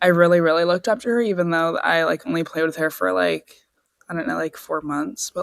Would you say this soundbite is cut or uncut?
uncut